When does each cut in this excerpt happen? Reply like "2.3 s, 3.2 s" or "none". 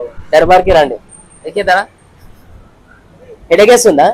none

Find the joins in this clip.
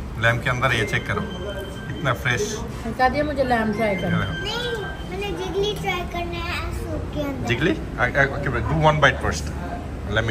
none

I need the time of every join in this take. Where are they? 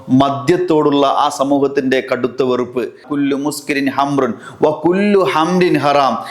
3.0 s

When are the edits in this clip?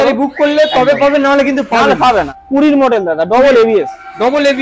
2.4 s

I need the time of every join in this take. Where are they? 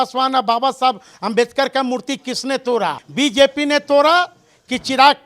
3.0 s

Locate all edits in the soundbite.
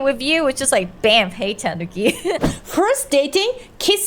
2.3 s

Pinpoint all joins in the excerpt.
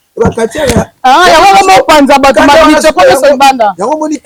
none

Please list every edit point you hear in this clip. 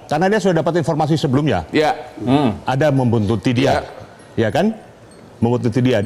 none

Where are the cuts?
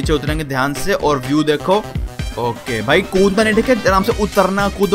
none

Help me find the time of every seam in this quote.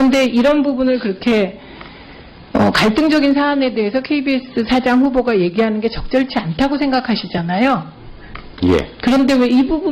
3.9 s

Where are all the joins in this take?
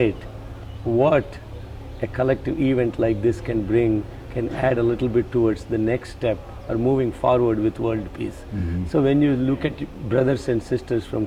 none

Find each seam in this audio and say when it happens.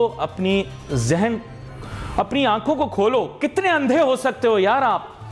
none

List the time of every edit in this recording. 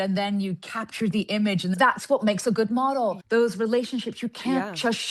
1.8 s, 3.2 s

